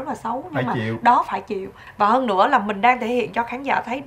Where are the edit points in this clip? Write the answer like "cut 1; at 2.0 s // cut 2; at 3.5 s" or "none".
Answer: cut 1; at 1.8 s

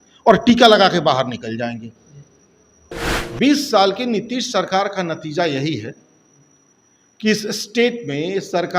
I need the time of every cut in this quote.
cut 1; at 3.1 s

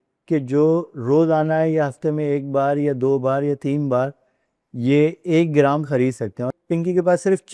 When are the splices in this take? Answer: cut 1; at 6.5 s

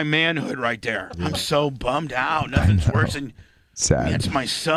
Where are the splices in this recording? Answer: cut 1; at 1.1 s

